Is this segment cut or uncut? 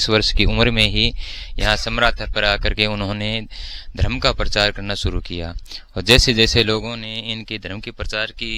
uncut